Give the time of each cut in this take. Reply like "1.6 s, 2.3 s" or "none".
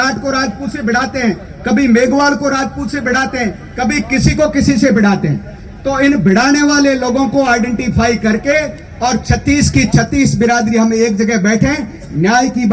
none